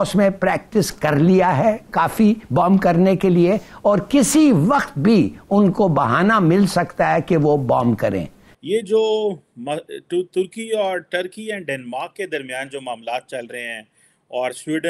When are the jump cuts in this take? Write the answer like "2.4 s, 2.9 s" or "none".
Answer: 8.4 s